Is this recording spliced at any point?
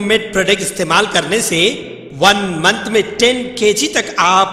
no; 0 cuts

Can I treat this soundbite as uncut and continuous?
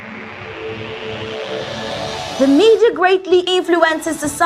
no; 1 cut; at 1.7 s

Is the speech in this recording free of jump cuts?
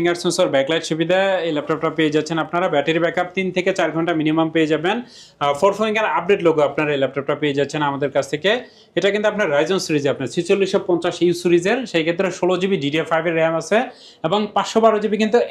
yes; 0 cuts

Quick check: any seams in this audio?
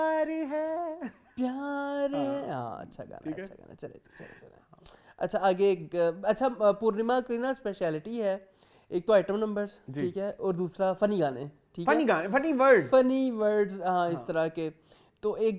no; 0 cuts

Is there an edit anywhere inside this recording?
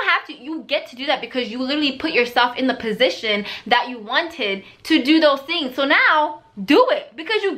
no; 0 cuts

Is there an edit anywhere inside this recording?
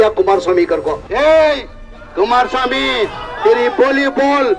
yes; 1 cut; at 1.0 s

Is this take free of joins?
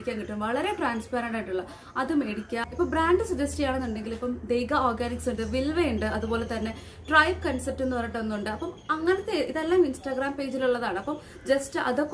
yes; 0 cuts

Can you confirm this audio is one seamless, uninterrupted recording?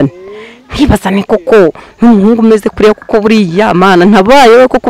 yes; 0 cuts

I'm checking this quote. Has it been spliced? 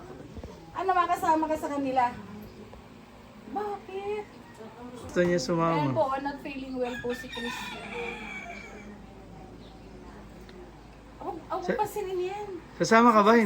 yes; 1 cut; at 5.1 s

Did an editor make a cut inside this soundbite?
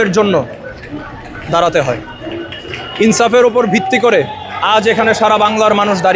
no; 0 cuts

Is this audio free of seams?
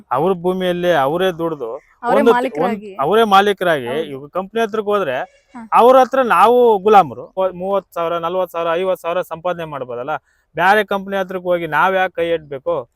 no; 1 cut; at 7.3 s

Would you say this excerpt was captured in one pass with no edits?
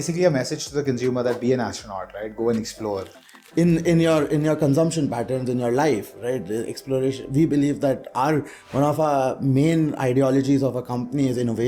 yes; 0 cuts

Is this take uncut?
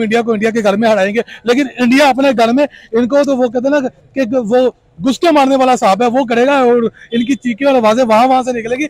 yes; 0 cuts

